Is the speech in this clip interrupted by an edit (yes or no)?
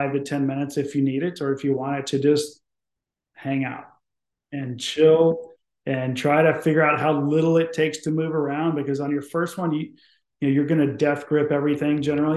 no